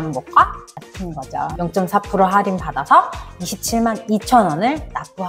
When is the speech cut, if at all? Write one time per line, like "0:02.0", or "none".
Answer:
0:01.5